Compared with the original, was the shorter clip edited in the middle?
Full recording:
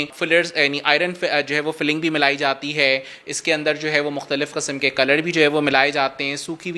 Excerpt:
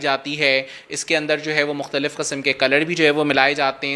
no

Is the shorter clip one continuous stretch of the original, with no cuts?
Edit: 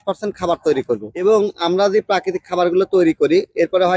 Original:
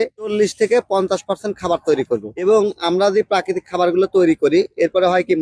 yes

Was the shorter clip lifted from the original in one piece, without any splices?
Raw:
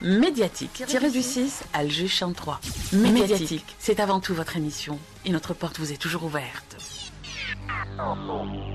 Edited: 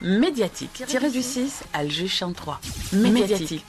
yes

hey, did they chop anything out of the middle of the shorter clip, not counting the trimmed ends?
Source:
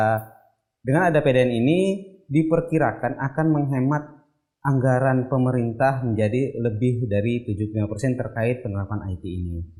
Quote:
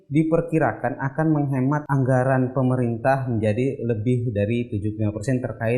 yes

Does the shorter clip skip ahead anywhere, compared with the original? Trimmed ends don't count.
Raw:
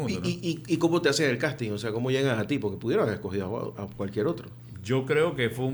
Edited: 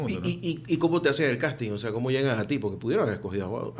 no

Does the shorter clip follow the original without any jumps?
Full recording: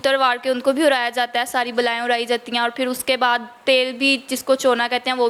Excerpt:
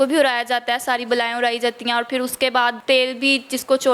no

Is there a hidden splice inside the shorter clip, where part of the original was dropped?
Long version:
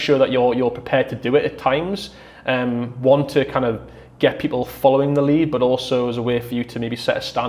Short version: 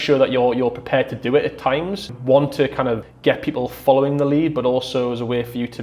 yes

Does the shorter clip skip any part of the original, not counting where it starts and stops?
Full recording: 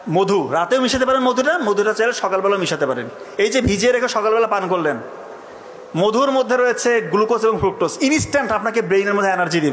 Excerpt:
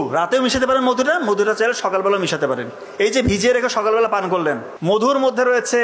yes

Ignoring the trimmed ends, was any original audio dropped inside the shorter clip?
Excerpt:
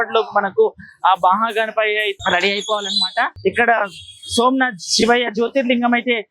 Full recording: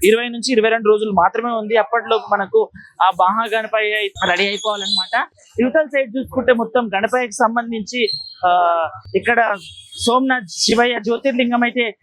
yes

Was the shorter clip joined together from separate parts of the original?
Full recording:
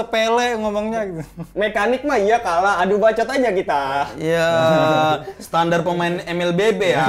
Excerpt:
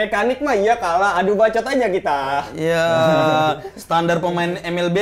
no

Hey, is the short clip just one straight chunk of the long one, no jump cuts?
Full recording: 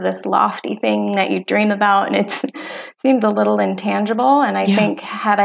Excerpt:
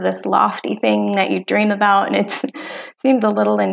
yes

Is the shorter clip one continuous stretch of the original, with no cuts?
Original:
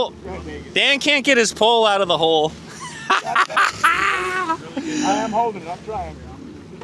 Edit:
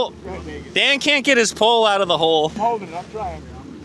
no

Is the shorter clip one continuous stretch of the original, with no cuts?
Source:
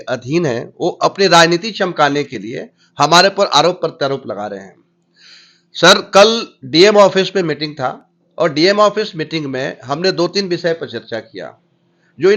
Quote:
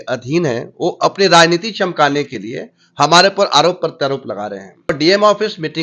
no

